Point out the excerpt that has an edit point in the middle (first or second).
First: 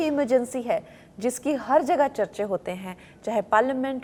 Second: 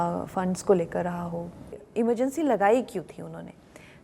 second